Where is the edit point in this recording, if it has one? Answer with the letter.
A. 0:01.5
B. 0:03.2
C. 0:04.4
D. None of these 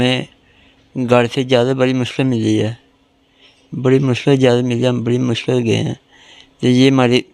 D